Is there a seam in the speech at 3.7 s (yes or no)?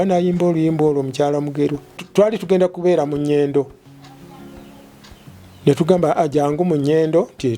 no